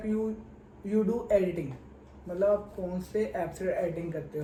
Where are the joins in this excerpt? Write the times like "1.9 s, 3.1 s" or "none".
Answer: none